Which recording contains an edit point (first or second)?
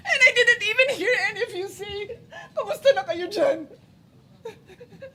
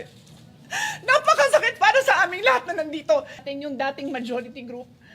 second